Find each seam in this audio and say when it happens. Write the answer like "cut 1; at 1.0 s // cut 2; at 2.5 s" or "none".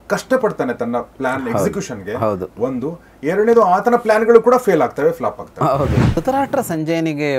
cut 1; at 6.2 s